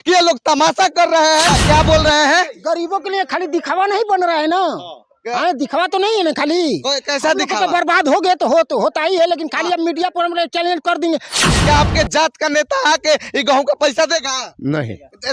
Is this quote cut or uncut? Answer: cut